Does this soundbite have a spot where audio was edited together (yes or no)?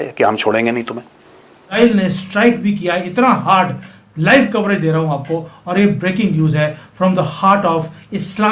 yes